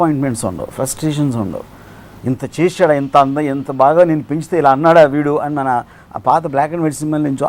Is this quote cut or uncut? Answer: uncut